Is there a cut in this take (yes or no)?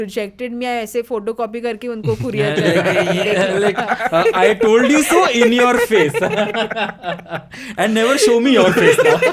no